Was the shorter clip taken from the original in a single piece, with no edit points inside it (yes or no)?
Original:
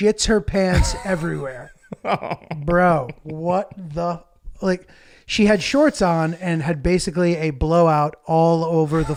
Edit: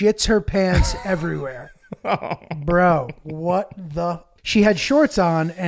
no